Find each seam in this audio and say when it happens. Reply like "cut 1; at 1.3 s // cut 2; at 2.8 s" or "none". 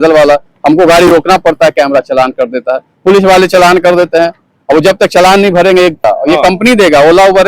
cut 1; at 6.0 s